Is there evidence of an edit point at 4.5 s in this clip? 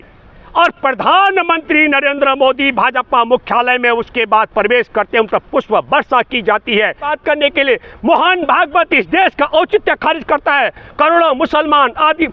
no; 1 cut; at 7.2 s

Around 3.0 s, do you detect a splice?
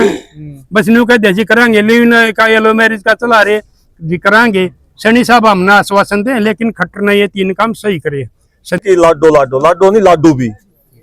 no; 1 cut; at 8.8 s

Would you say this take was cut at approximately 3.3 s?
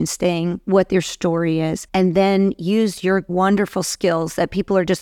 yes; 2 cuts; at 1.8 s, 3.3 s

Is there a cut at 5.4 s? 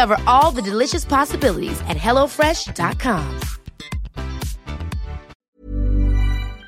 yes; 1 cut; at 5.4 s

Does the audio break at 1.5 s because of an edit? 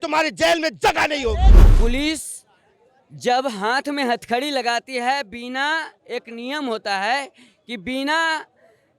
yes; 1 cut; at 1.5 s

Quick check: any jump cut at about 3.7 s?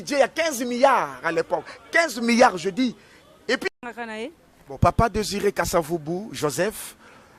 yes; 1 cut; at 3.7 s

